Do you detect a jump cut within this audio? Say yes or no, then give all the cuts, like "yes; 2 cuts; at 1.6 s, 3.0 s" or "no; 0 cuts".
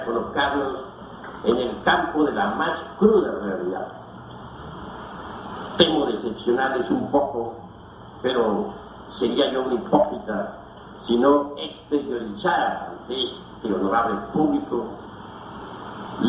no; 0 cuts